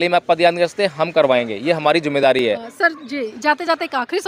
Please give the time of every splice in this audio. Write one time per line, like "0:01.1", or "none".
none